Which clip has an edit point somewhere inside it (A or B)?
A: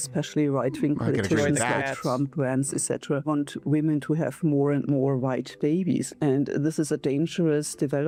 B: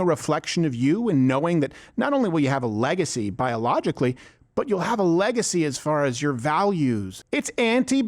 B